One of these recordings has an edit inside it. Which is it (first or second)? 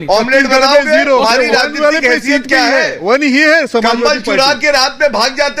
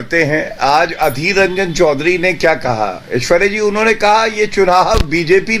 first